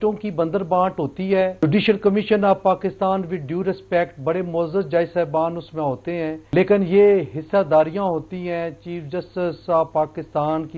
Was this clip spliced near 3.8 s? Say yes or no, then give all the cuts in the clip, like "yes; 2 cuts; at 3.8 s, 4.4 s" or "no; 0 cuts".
no; 2 cuts; at 1.6 s, 6.4 s